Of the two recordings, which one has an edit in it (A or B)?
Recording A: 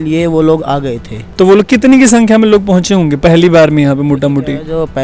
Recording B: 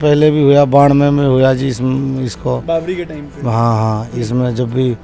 A